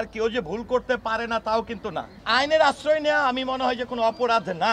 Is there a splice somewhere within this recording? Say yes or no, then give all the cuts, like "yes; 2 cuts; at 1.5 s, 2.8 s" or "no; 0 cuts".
yes; 1 cut; at 2.2 s